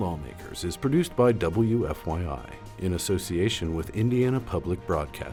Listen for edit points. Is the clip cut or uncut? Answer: uncut